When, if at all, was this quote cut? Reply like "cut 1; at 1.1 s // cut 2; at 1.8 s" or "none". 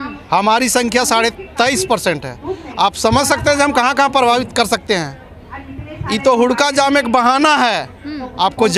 none